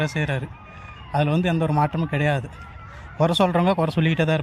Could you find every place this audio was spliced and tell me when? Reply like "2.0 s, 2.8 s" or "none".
none